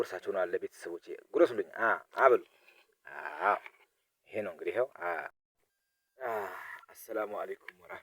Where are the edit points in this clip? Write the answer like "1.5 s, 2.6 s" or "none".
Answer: 5.5 s